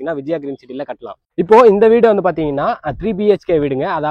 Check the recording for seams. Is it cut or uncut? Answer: uncut